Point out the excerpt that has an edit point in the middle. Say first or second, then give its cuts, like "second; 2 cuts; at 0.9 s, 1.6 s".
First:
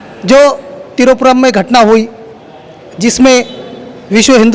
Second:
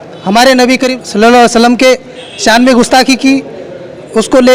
second; 1 cut; at 1.0 s